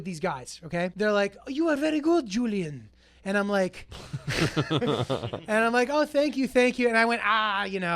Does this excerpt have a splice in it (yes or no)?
yes